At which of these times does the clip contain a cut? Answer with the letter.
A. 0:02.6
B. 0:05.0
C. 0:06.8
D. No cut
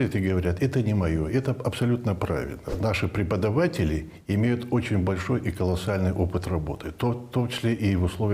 A